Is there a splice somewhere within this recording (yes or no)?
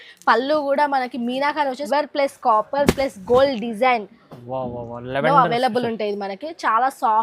yes